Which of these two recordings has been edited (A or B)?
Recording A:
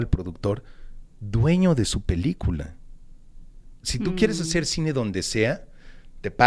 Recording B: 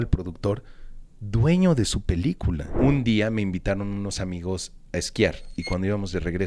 B